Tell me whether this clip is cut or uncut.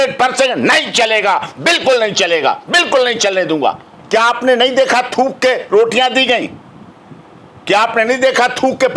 cut